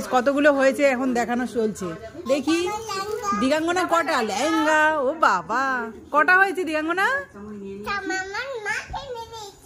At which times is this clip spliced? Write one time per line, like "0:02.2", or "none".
none